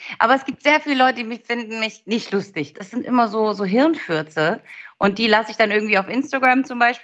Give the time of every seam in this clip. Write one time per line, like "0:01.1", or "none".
0:02.8